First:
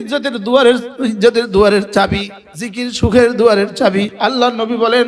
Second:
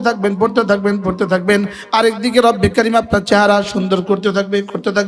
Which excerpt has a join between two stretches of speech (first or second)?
first